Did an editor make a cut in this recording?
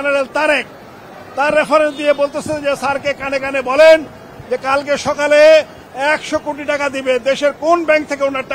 no; 0 cuts

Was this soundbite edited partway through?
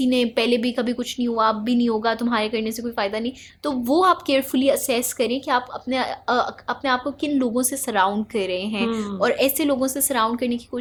no; 0 cuts

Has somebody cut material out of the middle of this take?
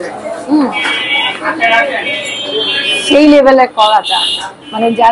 no; 0 cuts

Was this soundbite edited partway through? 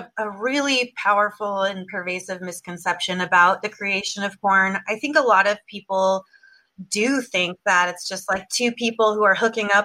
no; 0 cuts

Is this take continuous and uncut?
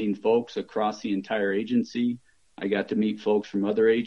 yes; 0 cuts

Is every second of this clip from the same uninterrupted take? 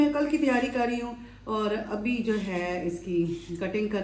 yes; 0 cuts

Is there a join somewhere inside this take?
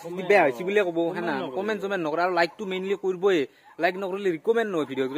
no; 0 cuts

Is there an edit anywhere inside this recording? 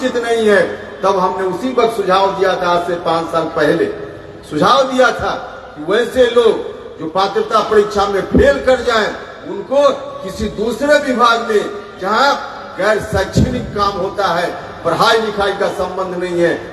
no; 0 cuts

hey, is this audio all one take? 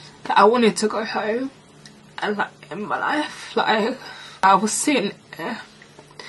no; 1 cut; at 4.4 s

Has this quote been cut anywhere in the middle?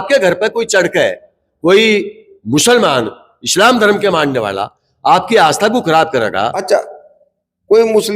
yes; 1 cut; at 6.6 s

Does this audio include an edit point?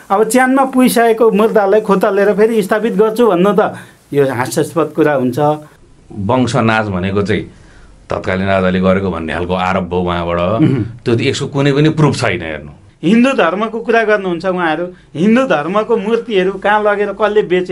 yes; 2 cuts; at 5.8 s, 12.9 s

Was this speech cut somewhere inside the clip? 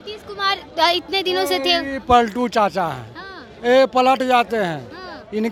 no; 0 cuts

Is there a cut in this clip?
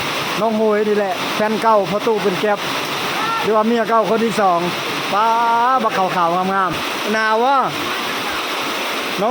yes; 1 cut; at 6.7 s

